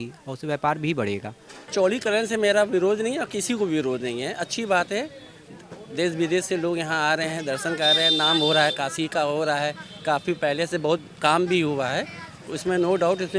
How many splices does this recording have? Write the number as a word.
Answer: one